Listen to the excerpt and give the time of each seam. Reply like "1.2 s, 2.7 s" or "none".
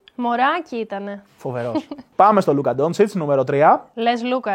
2.1 s

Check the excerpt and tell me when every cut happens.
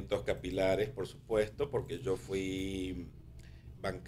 none

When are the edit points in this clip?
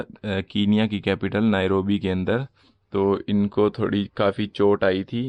none

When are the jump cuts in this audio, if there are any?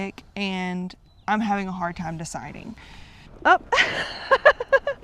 3.3 s

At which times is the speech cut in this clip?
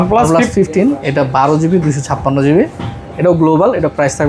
none

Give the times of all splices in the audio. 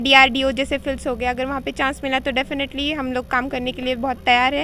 none

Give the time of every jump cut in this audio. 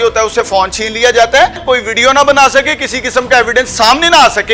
1.6 s

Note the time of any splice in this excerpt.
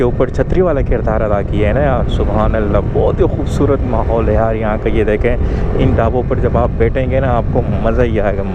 none

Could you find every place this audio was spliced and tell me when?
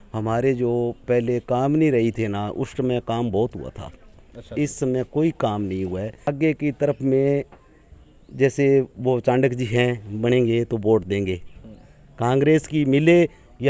6.3 s

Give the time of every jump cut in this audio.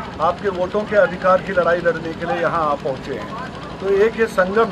none

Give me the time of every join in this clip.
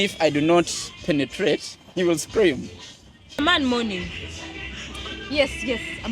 3.4 s

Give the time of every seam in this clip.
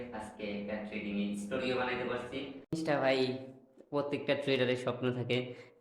2.8 s

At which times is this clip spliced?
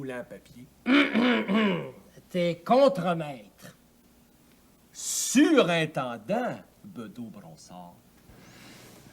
8.1 s

